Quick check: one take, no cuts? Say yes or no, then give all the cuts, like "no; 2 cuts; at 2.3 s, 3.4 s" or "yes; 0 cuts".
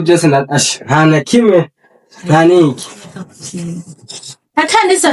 yes; 0 cuts